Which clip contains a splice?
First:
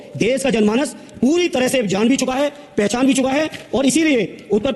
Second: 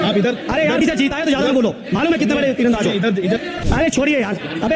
second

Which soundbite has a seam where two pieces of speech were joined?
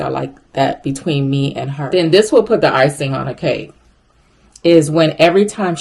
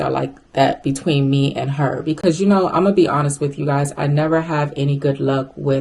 first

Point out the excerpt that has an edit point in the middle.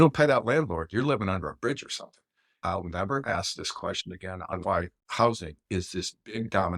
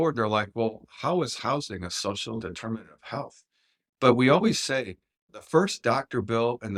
first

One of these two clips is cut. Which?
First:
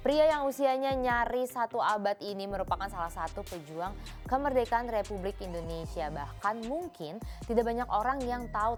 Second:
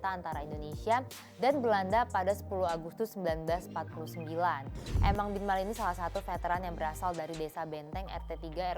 second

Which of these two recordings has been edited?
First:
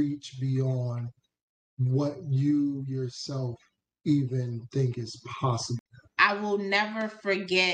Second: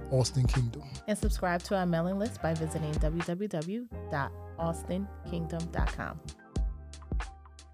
first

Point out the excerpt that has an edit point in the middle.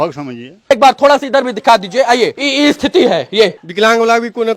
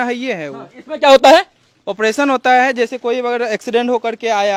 first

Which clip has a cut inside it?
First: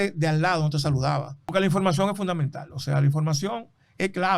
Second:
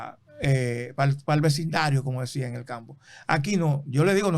first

